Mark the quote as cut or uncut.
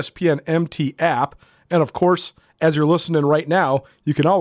uncut